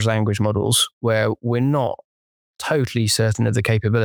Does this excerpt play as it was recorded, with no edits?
yes; 0 cuts

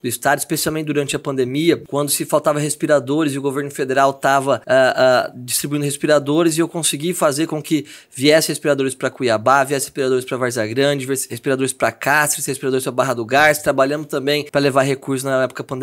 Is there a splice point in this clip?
yes; 3 cuts; at 1.9 s, 4.6 s, 14.5 s

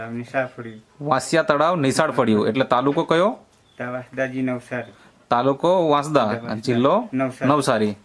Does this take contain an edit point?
no; 0 cuts

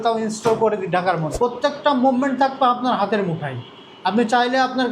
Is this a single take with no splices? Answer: no; 1 cut; at 1.3 s

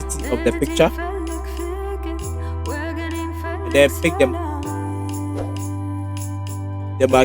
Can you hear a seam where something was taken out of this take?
no; 0 cuts

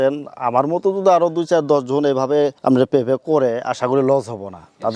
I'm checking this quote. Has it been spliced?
no; 0 cuts

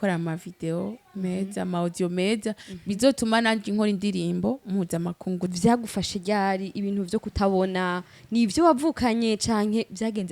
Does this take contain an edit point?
yes; 1 cut; at 5.5 s

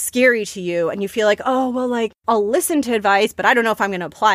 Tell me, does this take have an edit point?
yes; 1 cut; at 2.2 s

